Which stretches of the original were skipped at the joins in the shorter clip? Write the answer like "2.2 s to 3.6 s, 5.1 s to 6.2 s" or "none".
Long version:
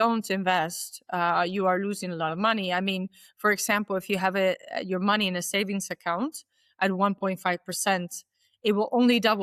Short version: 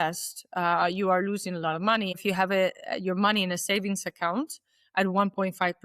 2.7 s to 4.0 s